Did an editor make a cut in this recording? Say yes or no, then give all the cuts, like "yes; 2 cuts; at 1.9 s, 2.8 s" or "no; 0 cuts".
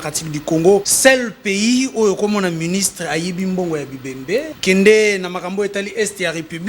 yes; 2 cuts; at 0.9 s, 4.5 s